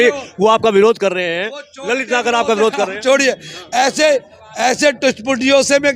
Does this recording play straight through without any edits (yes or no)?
yes